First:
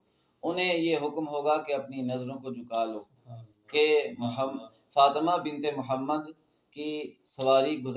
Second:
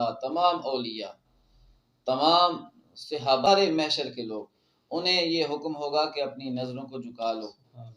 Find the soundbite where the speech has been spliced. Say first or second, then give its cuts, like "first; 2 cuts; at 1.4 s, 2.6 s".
second; 1 cut; at 3.5 s